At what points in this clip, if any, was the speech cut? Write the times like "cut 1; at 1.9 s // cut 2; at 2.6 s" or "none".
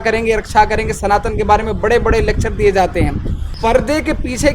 cut 1; at 3.5 s